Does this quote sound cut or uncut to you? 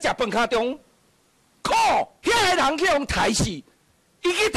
cut